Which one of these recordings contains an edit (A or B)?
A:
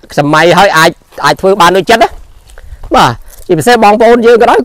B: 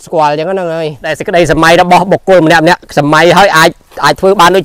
B